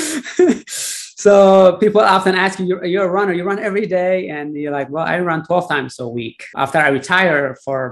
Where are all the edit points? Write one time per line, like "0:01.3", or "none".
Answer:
0:06.4